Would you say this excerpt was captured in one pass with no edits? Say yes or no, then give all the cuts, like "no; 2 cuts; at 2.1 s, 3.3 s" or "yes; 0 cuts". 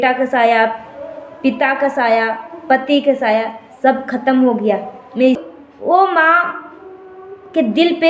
no; 1 cut; at 5.4 s